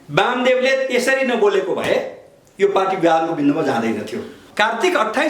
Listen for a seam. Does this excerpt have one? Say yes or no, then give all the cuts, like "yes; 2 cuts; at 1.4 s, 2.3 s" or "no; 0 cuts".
yes; 1 cut; at 4.4 s